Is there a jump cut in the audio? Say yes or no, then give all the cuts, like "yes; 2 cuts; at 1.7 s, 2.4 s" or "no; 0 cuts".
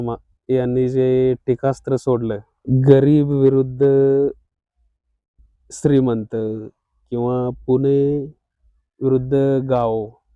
yes; 1 cut; at 2.5 s